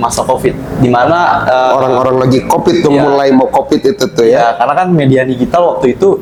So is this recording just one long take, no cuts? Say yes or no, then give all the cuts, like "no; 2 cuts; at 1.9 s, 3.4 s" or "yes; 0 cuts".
yes; 0 cuts